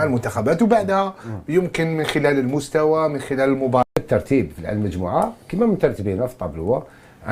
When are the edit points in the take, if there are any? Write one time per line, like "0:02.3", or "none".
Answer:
0:03.9